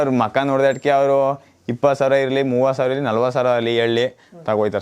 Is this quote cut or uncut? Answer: uncut